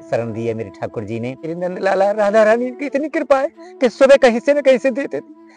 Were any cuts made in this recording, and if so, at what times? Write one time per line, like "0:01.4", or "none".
0:01.4